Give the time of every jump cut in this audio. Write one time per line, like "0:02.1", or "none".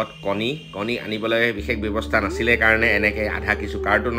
none

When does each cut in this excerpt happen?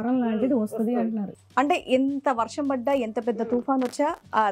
0:01.3

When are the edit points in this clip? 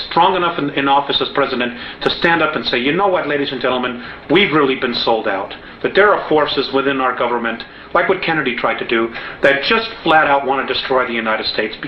none

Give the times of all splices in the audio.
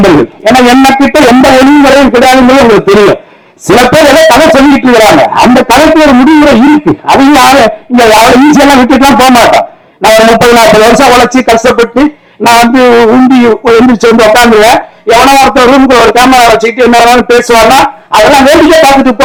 none

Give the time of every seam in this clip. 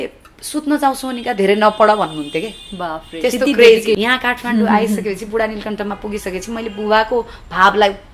0:04.0

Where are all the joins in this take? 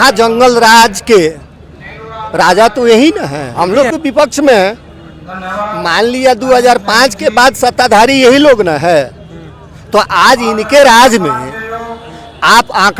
0:03.4

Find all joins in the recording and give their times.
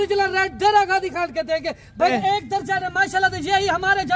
0:02.1

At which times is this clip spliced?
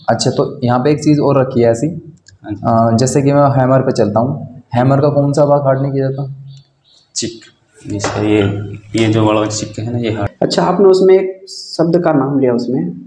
0:10.2

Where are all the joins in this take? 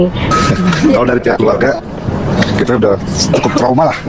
none

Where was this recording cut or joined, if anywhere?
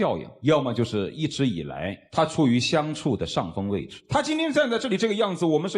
0:03.9

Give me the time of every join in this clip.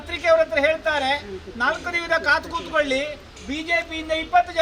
none

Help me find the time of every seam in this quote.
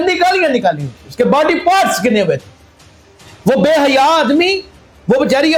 none

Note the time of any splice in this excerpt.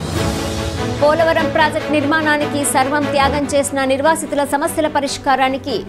0:01.0

